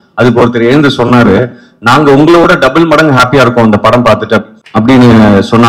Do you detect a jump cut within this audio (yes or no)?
yes